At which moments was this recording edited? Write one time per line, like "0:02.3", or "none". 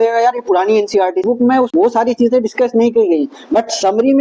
0:01.3